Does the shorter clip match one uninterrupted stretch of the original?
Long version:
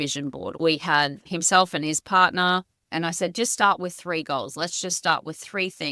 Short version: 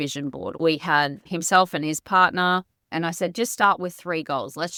yes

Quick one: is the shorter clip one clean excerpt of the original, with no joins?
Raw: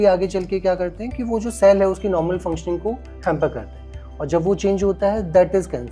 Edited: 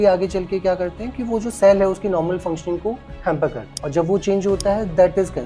no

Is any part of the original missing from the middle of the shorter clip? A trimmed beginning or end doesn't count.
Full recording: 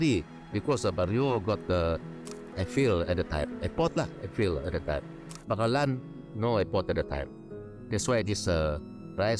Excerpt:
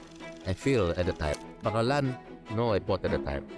yes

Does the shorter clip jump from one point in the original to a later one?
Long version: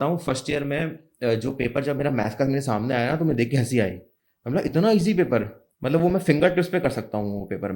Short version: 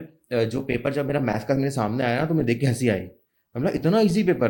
no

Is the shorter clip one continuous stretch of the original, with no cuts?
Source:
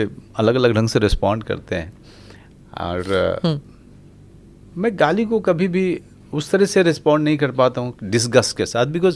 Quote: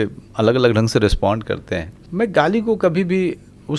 no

